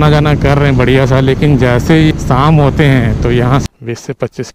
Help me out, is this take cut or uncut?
cut